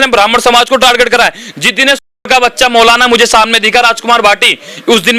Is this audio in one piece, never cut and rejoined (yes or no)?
yes